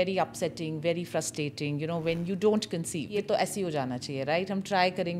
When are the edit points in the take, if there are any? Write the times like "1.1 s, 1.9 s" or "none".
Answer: 3.1 s